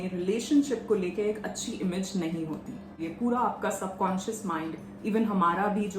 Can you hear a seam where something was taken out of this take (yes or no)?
yes